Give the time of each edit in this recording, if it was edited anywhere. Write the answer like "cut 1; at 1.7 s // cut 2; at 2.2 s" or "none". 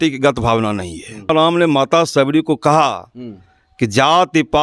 cut 1; at 1.3 s